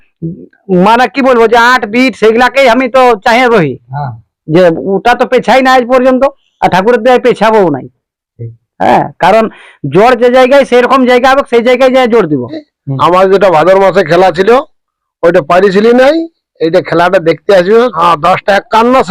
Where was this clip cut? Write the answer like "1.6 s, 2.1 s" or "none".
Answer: 12.7 s, 18.0 s